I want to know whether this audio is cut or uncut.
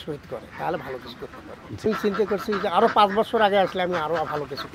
cut